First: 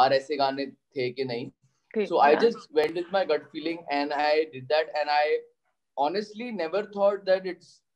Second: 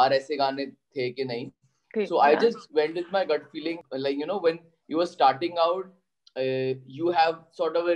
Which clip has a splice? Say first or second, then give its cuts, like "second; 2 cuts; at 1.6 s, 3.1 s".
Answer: second; 1 cut; at 3.8 s